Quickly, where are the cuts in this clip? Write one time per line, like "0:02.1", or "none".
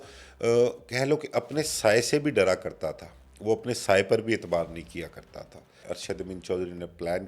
0:05.9